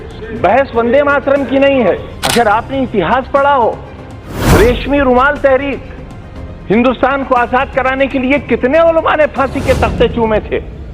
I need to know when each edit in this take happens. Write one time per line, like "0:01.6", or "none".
0:02.1